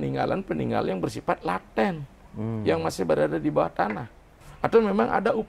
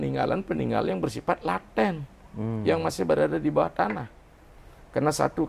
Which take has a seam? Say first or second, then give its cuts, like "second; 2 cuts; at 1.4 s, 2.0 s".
first; 1 cut; at 4.4 s